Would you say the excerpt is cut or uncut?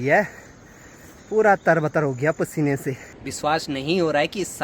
cut